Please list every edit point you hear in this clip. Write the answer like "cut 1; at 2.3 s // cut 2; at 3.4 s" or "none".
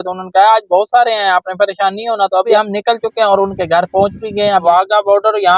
cut 1; at 2.5 s // cut 2; at 4.6 s